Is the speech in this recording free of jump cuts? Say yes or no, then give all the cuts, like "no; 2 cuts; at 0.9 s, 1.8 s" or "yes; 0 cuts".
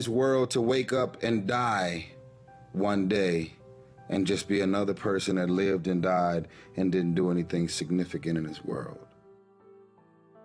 no; 1 cut; at 9.0 s